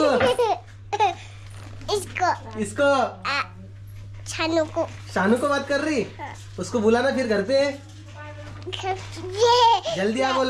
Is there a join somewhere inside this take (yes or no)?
no